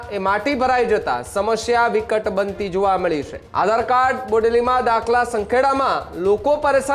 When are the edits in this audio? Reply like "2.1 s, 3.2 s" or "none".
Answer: 3.4 s